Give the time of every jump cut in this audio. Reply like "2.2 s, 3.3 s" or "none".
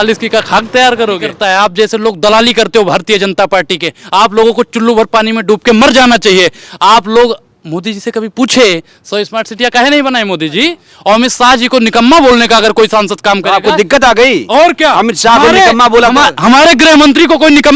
1.3 s, 10.9 s

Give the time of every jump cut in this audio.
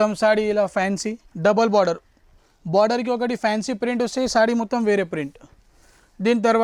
1.2 s

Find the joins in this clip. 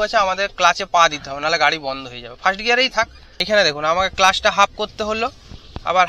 3.4 s

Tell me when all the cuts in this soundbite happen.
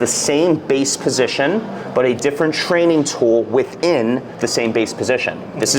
4.3 s

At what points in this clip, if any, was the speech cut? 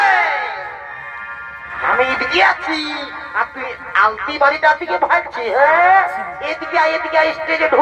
none

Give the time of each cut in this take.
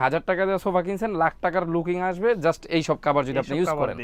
none

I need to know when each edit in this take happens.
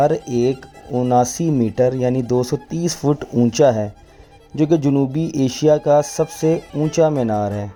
none

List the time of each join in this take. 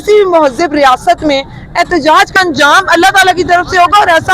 2.3 s

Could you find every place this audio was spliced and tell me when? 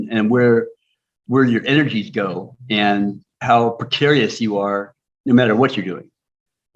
none

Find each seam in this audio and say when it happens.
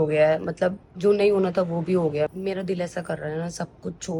none

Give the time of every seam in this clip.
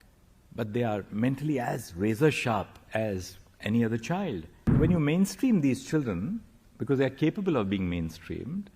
4.7 s

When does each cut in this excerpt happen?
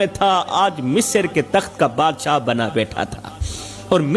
none

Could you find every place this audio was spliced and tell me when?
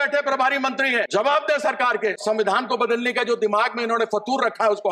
1.1 s, 2.2 s

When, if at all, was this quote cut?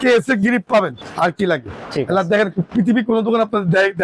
1.0 s

